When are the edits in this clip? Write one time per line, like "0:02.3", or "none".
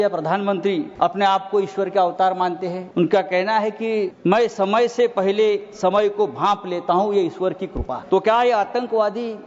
0:00.9
0:02.8
0:04.1
0:08.0